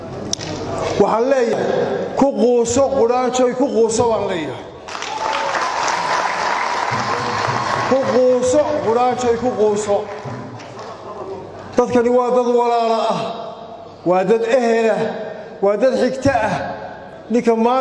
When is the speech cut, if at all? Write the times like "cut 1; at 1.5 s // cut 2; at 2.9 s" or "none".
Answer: cut 1; at 1.5 s

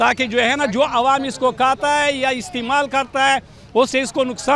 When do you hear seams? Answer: none

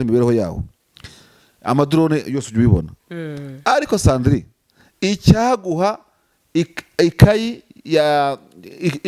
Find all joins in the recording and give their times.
none

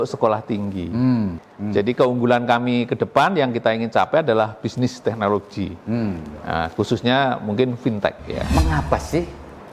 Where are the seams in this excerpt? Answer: cut 1; at 1.3 s // cut 2; at 8.3 s

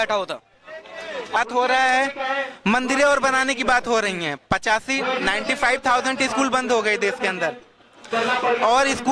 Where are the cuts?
cut 1; at 1.4 s

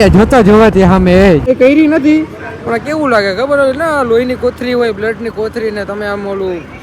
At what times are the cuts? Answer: cut 1; at 1.5 s

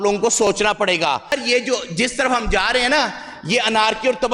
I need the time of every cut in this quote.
cut 1; at 1.3 s

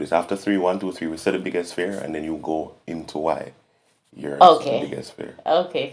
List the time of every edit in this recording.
none

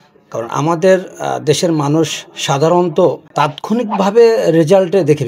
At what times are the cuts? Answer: cut 1; at 3.2 s

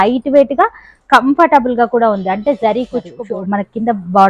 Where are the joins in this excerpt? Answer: cut 1; at 3.1 s

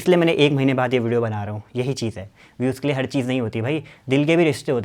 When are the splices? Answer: none

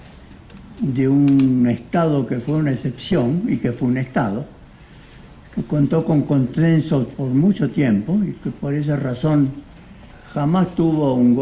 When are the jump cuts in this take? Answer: none

